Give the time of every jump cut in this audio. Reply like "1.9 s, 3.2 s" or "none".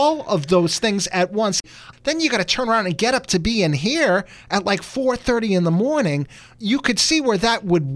1.7 s

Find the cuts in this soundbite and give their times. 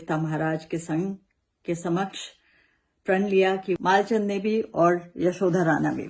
3.7 s

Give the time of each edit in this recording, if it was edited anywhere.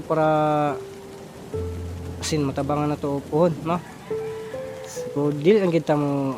3.9 s, 5.1 s

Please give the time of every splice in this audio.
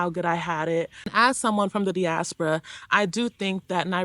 1.0 s

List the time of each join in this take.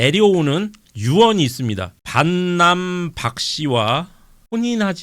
2.0 s

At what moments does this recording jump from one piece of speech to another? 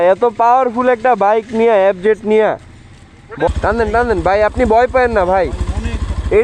3.5 s

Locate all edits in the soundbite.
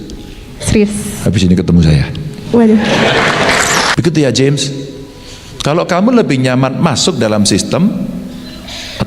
3.9 s

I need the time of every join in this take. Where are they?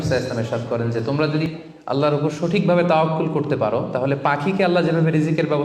1.4 s

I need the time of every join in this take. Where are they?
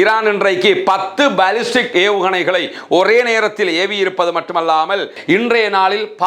5.1 s

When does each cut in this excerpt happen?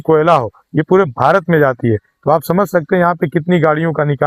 none

